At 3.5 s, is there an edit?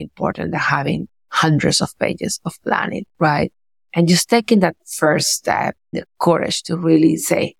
no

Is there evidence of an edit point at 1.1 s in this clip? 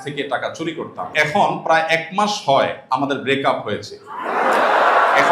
yes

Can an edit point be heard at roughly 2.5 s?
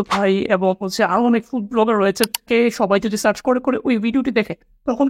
yes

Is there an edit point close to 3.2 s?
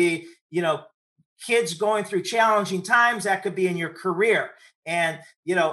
no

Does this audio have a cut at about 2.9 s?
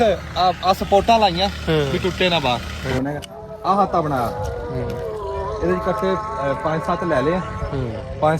yes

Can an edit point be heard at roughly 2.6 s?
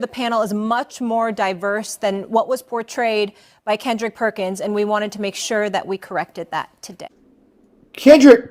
no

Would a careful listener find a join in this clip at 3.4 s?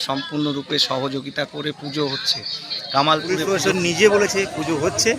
yes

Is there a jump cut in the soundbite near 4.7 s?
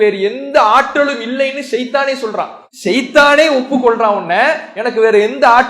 no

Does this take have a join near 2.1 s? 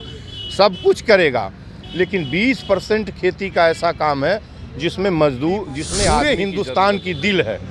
no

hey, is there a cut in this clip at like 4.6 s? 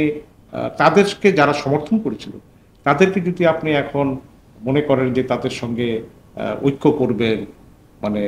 no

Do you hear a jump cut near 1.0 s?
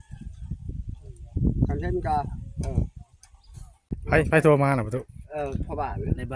no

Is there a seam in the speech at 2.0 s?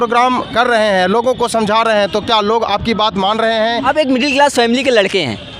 no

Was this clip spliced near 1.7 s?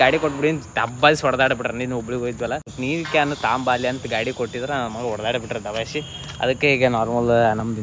no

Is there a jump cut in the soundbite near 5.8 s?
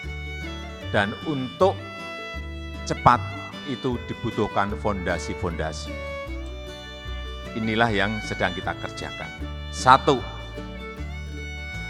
yes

